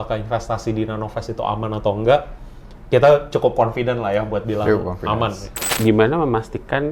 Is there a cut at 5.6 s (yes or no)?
yes